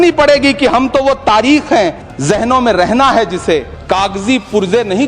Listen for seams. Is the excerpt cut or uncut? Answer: cut